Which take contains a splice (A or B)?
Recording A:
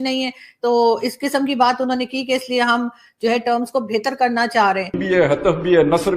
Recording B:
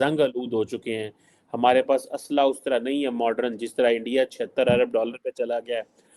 A